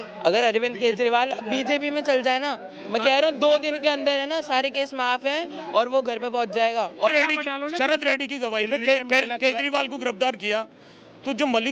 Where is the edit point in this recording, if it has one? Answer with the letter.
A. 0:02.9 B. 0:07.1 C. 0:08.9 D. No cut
B